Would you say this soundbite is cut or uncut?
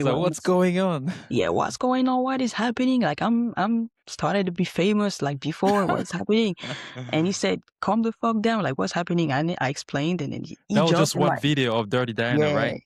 uncut